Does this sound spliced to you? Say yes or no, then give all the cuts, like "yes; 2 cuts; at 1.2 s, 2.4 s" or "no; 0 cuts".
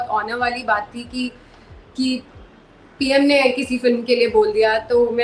no; 0 cuts